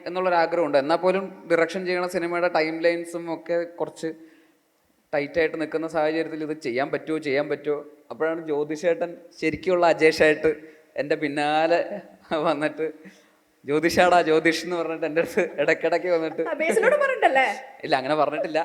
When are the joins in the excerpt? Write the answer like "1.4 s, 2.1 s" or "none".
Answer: none